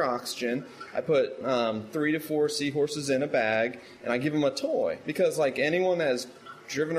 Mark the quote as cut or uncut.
uncut